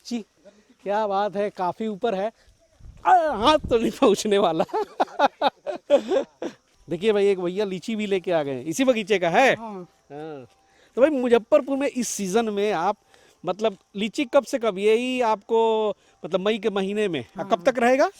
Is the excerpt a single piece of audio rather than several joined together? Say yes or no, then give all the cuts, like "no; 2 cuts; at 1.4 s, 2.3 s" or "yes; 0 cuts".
yes; 0 cuts